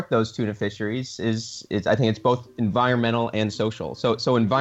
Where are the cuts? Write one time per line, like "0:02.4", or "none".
none